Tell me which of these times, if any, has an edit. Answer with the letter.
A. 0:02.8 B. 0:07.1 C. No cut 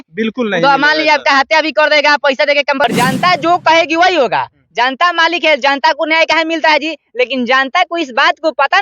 A